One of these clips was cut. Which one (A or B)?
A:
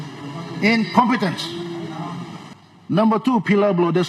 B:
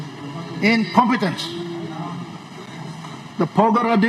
A